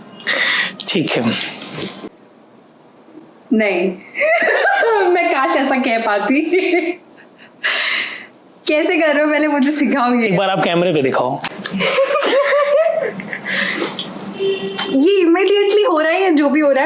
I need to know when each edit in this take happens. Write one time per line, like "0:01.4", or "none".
0:02.0
0:11.5